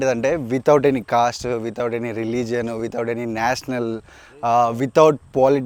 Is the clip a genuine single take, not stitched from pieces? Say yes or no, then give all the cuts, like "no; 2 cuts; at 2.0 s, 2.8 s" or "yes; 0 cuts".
yes; 0 cuts